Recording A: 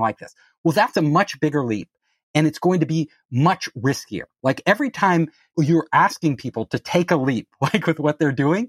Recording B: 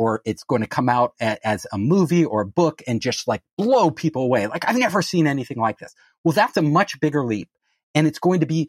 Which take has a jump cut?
A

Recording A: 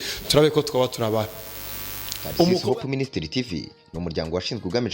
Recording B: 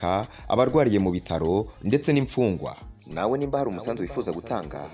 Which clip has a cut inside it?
A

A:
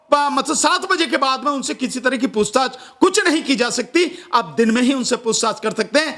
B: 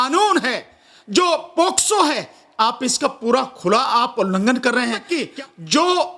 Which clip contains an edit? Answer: B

